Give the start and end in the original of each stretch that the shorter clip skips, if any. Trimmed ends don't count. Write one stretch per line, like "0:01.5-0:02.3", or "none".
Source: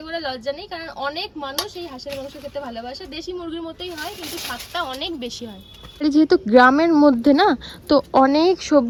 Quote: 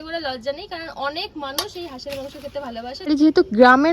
0:03.0-0:05.9